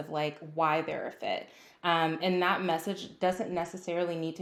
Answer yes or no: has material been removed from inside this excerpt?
no